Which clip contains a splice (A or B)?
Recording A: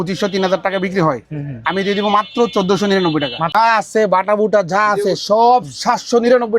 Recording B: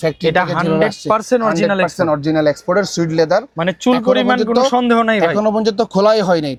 A